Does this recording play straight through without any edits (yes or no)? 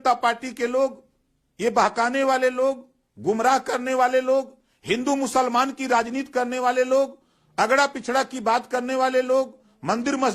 yes